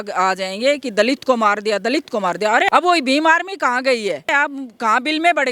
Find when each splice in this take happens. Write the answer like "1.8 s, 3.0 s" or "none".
2.7 s, 4.3 s